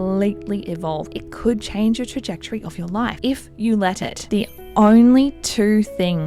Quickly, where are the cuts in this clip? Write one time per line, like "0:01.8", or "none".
0:01.1
0:03.2
0:04.2